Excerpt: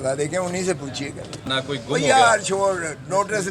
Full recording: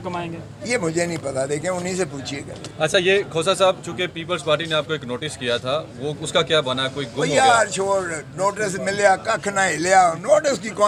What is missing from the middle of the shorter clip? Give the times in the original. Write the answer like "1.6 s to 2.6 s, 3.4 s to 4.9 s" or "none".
2.8 s to 6.7 s